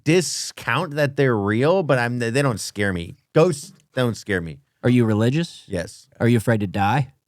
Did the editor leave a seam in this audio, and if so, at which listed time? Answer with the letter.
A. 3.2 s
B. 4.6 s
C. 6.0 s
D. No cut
C